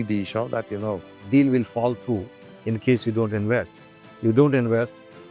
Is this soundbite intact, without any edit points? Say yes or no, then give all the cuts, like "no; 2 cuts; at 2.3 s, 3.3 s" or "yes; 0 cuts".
yes; 0 cuts